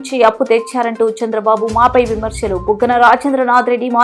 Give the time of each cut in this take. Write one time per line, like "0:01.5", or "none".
none

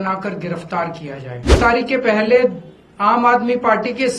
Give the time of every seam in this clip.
0:01.5

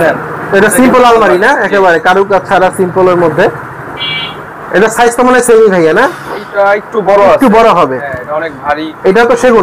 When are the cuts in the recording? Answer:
none

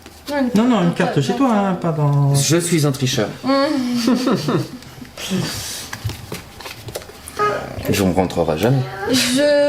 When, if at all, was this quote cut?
0:07.4

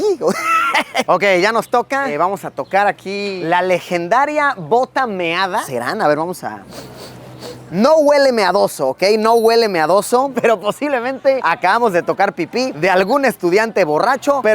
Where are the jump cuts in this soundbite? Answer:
0:01.0
0:02.1
0:03.4
0:05.6
0:10.3

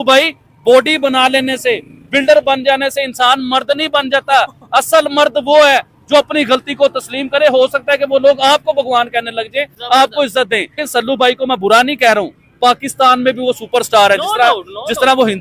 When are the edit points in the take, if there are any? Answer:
0:10.8

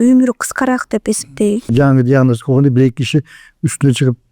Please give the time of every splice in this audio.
0:01.7

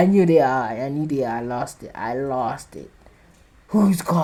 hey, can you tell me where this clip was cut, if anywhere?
none

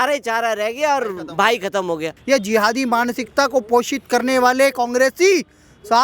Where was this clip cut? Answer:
0:02.1

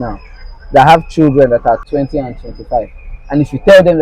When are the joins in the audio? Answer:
0:01.8

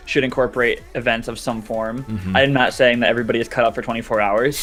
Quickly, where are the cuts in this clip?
none

